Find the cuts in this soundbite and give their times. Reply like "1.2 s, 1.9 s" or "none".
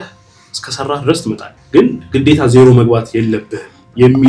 1.5 s